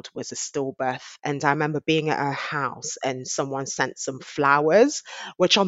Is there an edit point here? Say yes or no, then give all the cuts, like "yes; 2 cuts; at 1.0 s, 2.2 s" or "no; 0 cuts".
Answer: yes; 1 cut; at 1.1 s